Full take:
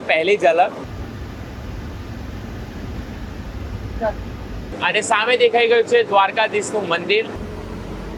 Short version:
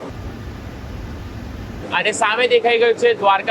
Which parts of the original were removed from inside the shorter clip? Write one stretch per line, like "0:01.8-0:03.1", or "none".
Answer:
0:02.6-0:04.7